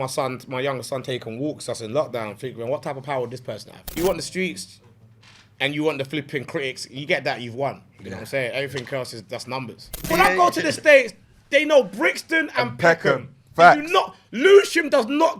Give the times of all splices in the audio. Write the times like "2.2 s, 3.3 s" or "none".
4.0 s, 10.1 s